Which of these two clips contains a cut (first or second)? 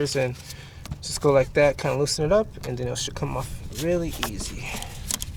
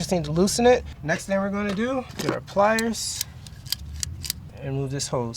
second